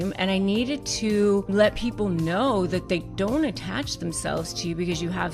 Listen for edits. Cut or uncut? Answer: cut